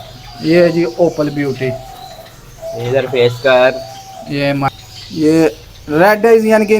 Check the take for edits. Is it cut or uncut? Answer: cut